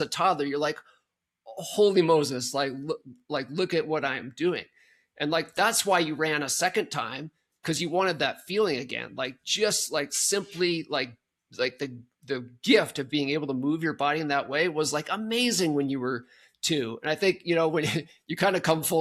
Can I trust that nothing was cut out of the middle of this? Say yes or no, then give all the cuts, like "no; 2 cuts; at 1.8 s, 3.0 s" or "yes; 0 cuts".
yes; 0 cuts